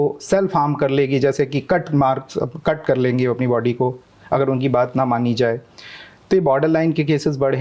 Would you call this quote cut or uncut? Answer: uncut